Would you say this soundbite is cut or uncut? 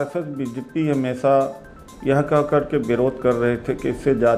uncut